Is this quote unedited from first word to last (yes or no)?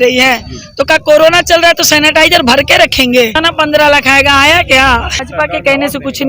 no